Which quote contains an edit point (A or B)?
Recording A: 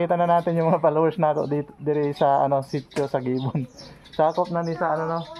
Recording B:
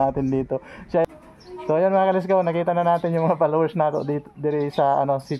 B